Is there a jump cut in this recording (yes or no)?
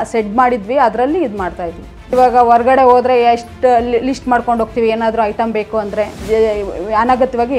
yes